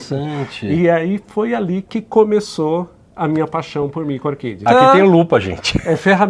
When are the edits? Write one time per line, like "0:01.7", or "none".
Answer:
0:04.6

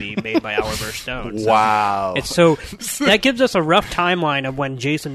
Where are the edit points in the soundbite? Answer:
0:02.8

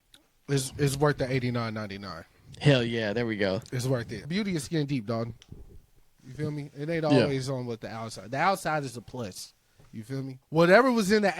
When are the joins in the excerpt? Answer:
0:04.3
0:10.4

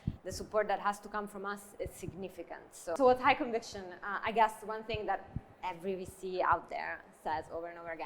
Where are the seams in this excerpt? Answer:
0:03.0

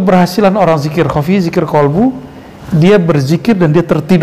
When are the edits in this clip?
none

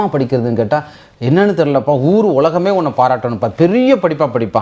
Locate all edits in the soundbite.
none

